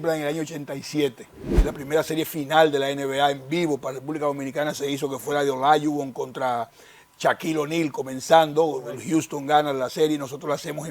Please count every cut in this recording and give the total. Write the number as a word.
one